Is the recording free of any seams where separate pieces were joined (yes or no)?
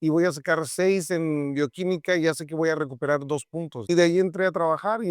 no